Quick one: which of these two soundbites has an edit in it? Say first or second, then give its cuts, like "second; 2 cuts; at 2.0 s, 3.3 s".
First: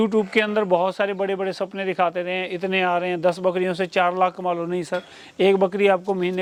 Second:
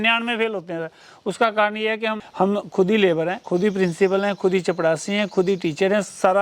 second; 2 cuts; at 2.2 s, 3.4 s